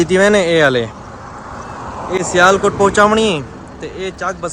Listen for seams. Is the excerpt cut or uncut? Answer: uncut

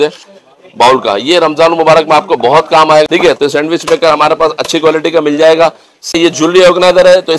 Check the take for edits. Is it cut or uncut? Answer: cut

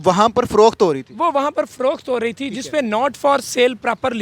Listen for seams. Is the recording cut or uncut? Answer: uncut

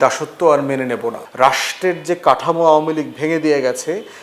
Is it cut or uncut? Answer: cut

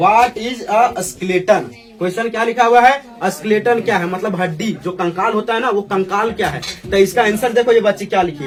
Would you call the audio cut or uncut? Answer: uncut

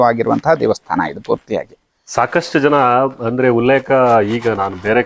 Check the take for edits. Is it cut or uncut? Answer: uncut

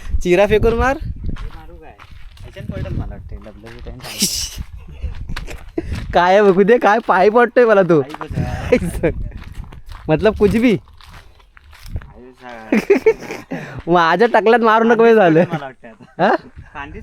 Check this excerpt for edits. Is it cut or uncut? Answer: cut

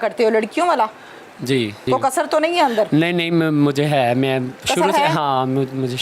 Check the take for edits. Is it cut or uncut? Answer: cut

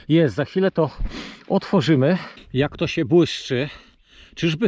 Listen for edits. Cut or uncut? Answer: cut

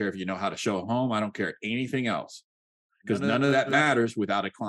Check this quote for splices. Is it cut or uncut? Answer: cut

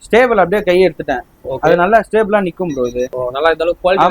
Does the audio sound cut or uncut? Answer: cut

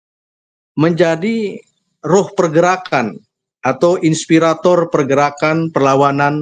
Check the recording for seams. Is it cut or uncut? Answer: uncut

